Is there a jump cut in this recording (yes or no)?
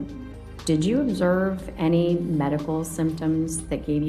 no